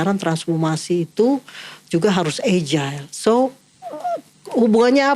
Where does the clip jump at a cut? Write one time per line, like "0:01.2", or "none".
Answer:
none

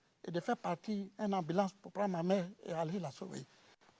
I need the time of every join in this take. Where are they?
0:01.1

